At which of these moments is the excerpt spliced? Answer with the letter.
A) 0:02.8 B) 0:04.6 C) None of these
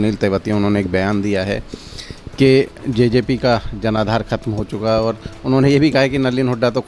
C